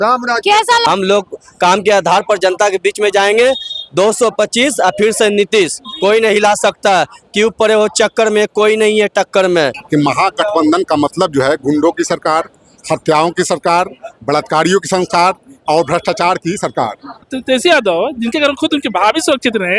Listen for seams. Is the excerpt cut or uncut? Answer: cut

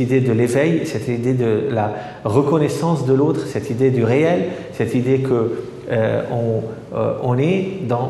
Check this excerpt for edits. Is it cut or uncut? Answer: uncut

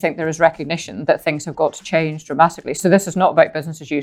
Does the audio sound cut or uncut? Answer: cut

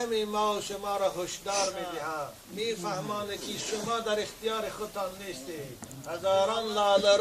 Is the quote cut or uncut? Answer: cut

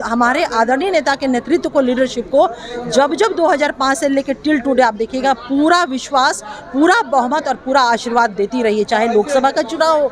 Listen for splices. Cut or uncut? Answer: uncut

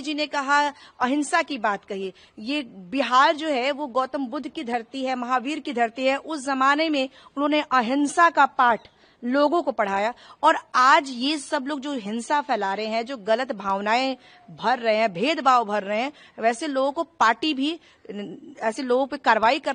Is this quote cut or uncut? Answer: uncut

